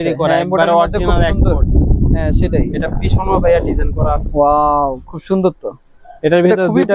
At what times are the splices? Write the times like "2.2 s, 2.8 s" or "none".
none

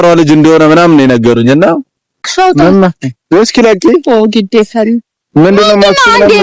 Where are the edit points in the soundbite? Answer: 2.3 s

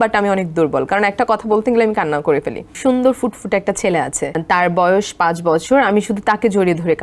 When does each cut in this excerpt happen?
2.7 s, 4.4 s

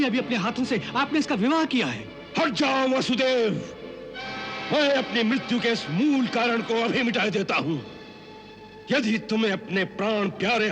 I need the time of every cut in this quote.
none

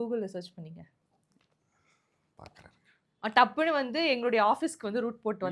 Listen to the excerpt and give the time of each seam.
none

